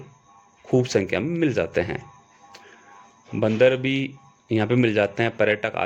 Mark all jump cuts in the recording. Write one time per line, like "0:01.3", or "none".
none